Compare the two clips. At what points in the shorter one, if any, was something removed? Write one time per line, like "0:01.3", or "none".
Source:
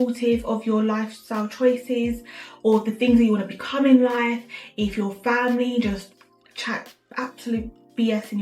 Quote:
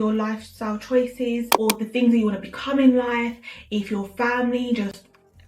0:01.5